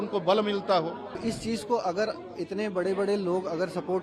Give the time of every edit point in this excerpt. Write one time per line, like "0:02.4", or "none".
0:01.2